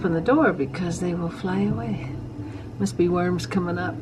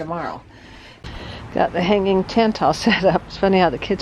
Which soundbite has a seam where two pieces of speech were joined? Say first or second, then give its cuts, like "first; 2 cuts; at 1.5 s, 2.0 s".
second; 1 cut; at 1.0 s